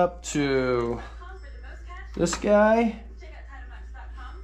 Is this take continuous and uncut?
yes; 0 cuts

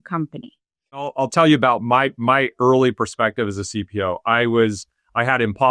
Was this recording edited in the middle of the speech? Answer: yes; 1 cut; at 1.1 s

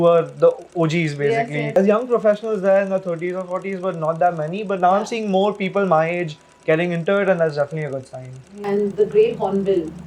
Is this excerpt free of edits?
no; 2 cuts; at 1.8 s, 8.5 s

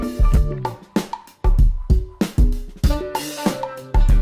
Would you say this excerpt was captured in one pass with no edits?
yes; 0 cuts

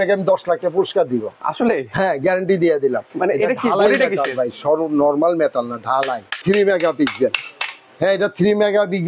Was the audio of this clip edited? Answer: yes; 1 cut; at 6.4 s

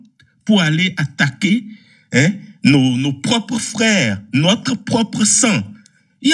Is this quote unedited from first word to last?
yes; 0 cuts

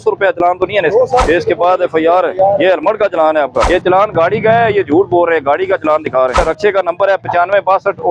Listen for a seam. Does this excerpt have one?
yes; 3 cuts; at 1.2 s, 3.7 s, 6.4 s

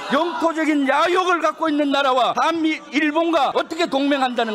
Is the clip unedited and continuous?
no; 2 cuts; at 2.3 s, 3.5 s

